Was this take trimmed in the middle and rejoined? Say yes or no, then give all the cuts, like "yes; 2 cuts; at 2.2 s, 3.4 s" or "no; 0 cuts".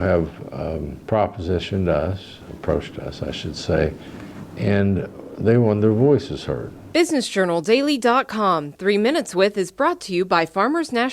yes; 1 cut; at 6.7 s